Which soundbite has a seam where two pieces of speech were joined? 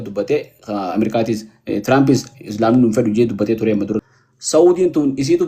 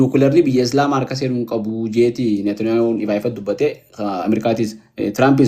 first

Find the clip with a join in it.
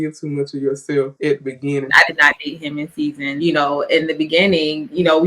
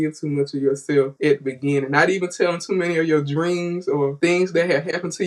first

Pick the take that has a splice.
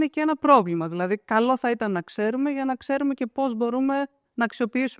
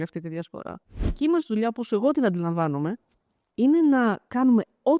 second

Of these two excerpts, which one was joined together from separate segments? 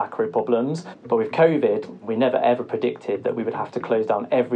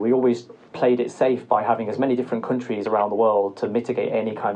first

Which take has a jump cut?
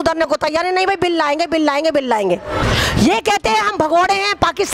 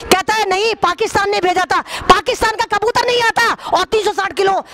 first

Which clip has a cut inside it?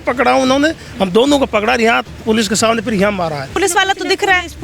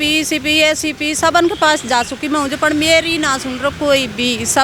first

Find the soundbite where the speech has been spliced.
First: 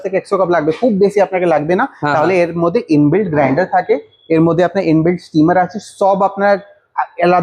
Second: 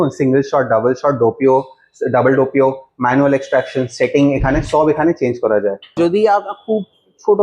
second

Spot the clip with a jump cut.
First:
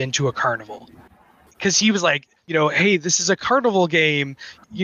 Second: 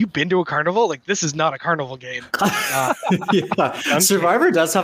first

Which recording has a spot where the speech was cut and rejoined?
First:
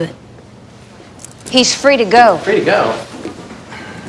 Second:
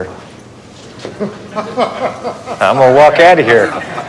first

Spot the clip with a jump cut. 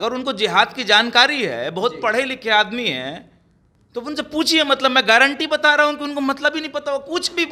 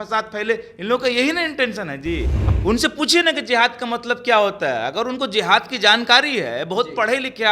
second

